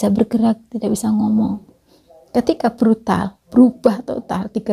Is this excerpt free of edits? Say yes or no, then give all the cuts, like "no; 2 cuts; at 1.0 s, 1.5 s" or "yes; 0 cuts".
yes; 0 cuts